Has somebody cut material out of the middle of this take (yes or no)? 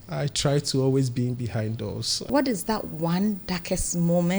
yes